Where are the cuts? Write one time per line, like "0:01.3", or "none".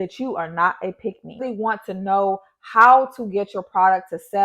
0:01.4

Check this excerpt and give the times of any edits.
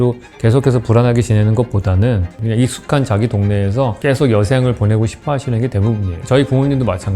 0:02.3
0:04.0
0:06.1

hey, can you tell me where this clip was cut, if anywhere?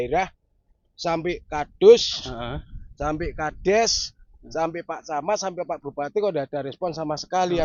none

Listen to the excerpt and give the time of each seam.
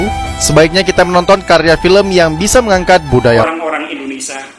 0:03.4

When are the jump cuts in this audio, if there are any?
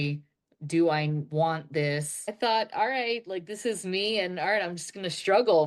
0:02.3

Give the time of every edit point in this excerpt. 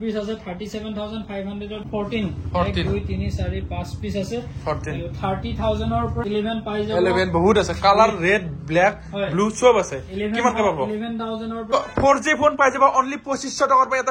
0:01.9
0:06.2
0:11.6

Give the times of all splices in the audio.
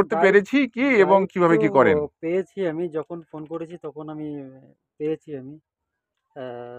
none

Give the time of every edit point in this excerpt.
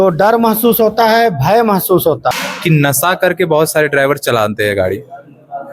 0:02.3

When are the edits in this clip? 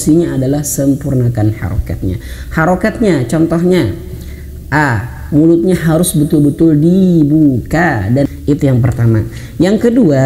0:08.3

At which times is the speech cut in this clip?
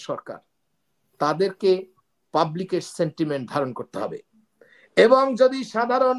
none

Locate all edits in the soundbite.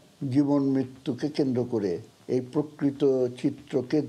0:02.1

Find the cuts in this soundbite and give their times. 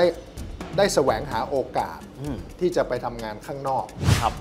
none

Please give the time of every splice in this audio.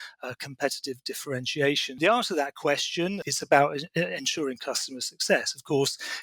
0:02.0
0:03.2

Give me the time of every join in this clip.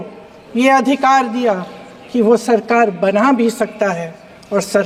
none

